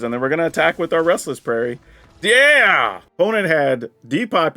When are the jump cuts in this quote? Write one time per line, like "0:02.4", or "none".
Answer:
0:03.0